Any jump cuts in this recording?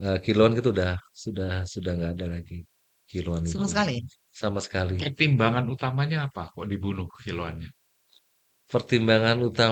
no; 0 cuts

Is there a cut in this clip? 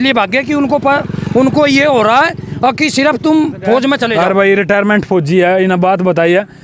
yes; 1 cut; at 4.1 s

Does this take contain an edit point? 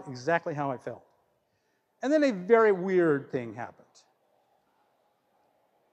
no; 0 cuts

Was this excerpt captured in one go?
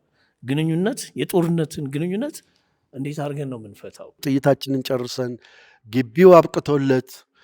no; 1 cut; at 4.2 s

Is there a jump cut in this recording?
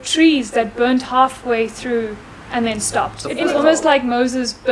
yes; 1 cut; at 3.5 s

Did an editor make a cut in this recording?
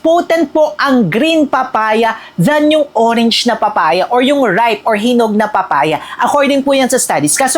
no; 0 cuts

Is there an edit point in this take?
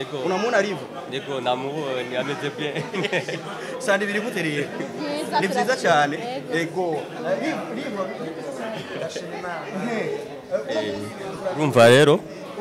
no; 0 cuts

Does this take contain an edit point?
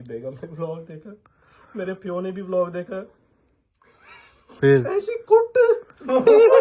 no; 0 cuts

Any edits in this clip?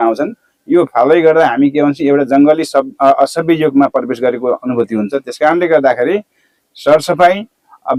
no; 0 cuts

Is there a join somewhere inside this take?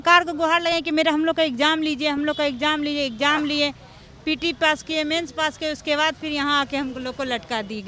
no; 0 cuts

